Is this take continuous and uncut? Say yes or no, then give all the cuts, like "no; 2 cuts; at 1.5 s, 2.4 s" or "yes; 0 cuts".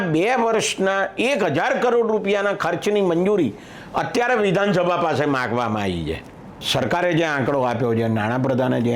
no; 1 cut; at 6.7 s